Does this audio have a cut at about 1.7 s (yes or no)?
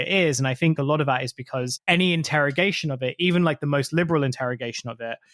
yes